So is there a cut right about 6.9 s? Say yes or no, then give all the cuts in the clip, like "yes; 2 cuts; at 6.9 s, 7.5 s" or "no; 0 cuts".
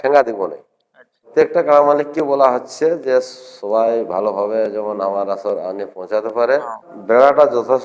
yes; 2 cuts; at 1.3 s, 6.9 s